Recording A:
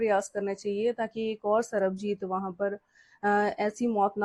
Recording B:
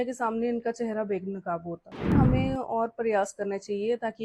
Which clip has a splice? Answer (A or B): B